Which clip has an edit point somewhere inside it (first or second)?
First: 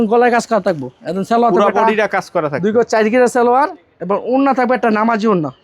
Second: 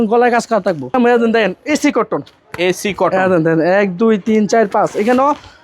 second